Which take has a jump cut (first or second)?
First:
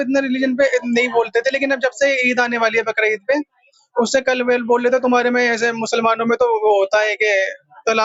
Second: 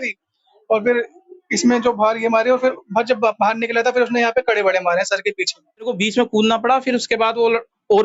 second